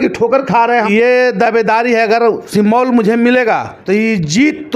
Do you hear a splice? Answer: yes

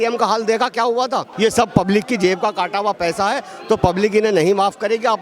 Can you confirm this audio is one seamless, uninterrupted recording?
no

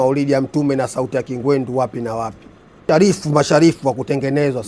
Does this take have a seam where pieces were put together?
yes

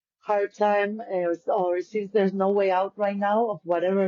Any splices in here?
no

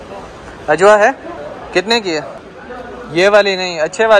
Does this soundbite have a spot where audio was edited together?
no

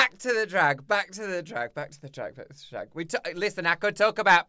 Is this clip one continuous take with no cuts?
yes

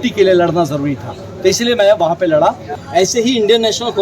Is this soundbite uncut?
no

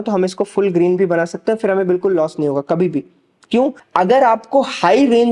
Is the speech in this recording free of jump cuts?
no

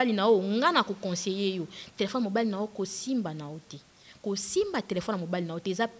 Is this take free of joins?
yes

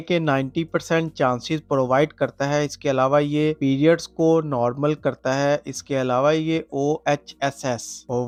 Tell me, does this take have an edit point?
no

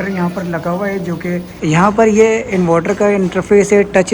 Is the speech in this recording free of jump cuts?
no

